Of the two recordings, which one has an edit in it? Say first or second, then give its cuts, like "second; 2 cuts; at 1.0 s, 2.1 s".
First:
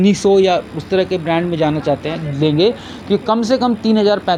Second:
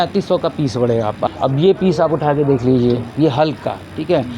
second; 1 cut; at 1.2 s